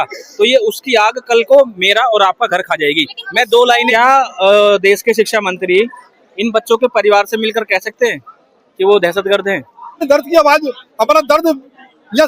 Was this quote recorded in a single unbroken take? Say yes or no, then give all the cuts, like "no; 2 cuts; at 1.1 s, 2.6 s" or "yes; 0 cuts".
no; 2 cuts; at 3.9 s, 10.0 s